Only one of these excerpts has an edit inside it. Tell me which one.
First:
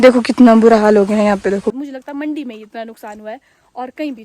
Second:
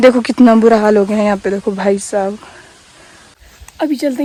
first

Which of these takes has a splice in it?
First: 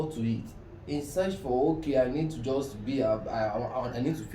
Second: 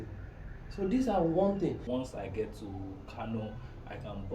second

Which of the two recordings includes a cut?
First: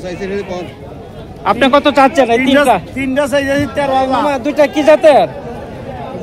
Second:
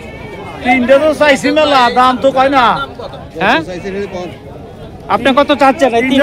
first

